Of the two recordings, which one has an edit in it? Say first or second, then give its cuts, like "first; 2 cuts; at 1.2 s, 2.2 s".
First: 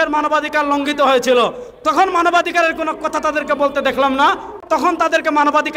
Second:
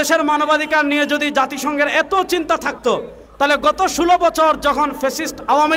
first; 1 cut; at 4.6 s